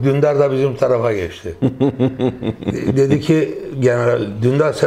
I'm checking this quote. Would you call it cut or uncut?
uncut